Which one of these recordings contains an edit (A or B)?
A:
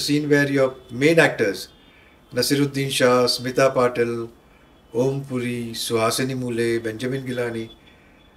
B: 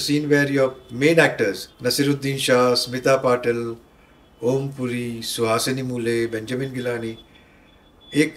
B